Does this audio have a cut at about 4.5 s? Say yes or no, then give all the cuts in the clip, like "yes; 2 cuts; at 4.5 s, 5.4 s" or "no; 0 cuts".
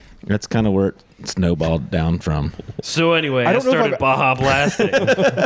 no; 1 cut; at 2.8 s